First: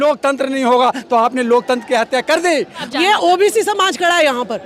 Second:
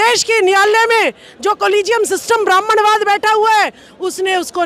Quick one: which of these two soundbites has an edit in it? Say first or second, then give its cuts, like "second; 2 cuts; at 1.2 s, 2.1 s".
first; 1 cut; at 2.8 s